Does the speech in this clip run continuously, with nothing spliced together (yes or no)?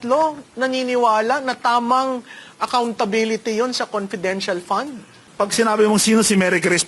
no